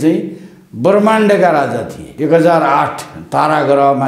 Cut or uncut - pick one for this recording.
cut